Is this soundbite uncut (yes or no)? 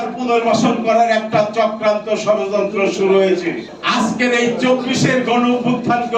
no